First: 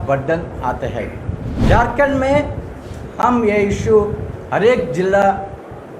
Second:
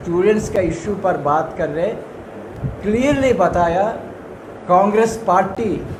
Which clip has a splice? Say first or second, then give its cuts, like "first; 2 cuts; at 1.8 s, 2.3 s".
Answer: first; 1 cut; at 1.5 s